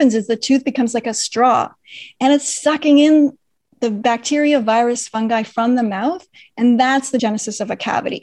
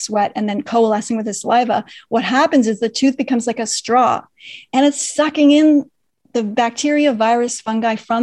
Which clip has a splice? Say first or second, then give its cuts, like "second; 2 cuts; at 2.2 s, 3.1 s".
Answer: first; 1 cut; at 7.2 s